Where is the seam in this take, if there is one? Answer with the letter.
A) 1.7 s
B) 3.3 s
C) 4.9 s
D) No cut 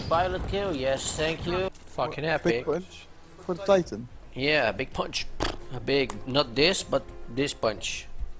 A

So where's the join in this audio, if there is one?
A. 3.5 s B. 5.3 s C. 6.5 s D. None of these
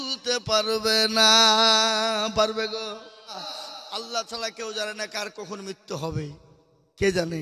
A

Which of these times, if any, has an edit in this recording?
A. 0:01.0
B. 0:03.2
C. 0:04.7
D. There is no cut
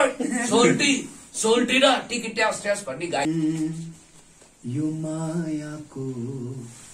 B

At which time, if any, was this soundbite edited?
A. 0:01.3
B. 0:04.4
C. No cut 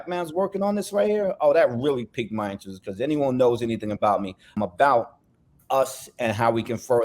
B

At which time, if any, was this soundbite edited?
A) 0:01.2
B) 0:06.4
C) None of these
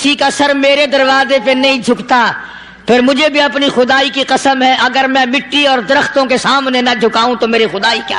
C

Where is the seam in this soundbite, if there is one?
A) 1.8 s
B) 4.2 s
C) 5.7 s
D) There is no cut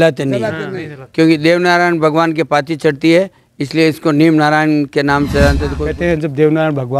C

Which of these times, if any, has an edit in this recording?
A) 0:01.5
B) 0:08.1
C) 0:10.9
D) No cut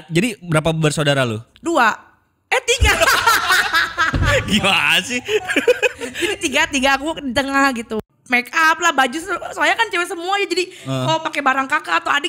B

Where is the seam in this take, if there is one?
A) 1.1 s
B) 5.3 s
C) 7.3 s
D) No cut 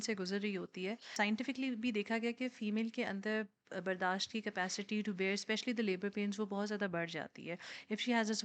A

